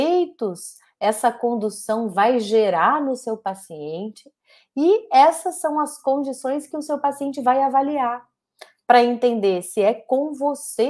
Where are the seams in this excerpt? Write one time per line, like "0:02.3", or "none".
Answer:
none